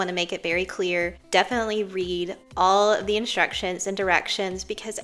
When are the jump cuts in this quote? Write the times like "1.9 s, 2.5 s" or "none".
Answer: 1.2 s, 2.4 s